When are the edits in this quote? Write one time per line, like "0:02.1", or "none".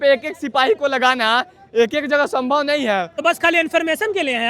0:03.1